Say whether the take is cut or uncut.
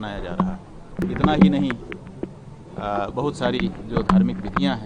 cut